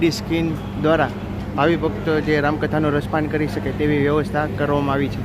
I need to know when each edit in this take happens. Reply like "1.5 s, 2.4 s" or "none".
none

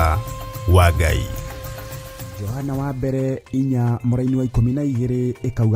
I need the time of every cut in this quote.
2.4 s

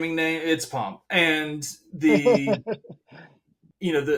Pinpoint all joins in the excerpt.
none

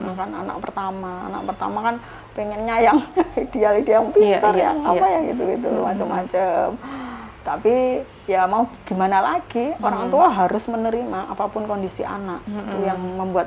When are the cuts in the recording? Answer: none

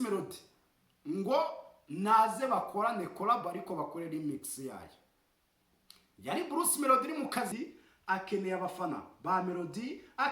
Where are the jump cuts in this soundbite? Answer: 7.5 s

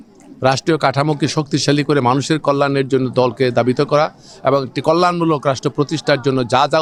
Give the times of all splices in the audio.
none

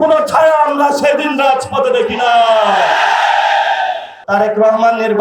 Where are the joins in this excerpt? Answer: 4.1 s

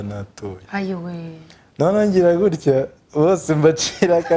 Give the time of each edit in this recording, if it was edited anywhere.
none

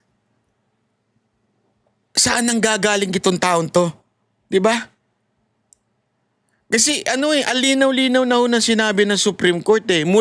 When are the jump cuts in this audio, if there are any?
none

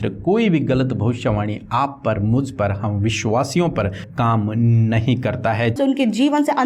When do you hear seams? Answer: 4.0 s, 5.8 s

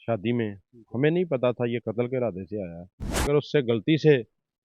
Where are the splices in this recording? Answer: 3.2 s

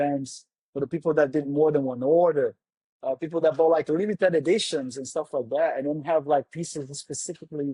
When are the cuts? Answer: none

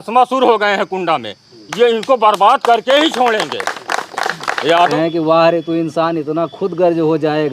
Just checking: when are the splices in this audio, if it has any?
4.9 s

